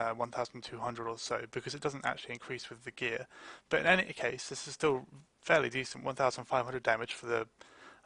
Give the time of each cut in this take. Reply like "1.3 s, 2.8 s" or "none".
4.4 s